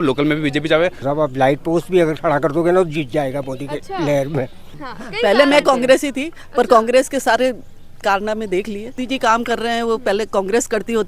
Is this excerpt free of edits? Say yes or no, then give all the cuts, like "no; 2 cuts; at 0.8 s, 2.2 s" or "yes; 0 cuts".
no; 3 cuts; at 1.1 s, 4.7 s, 9.0 s